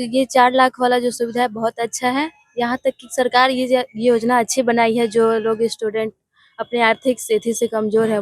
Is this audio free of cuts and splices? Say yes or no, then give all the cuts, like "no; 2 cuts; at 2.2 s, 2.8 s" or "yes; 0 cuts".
yes; 0 cuts